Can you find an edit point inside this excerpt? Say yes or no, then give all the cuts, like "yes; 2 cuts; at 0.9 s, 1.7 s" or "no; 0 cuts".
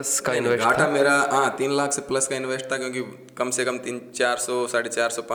no; 0 cuts